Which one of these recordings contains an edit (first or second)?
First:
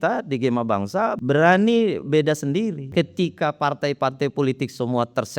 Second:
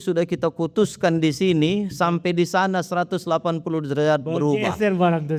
first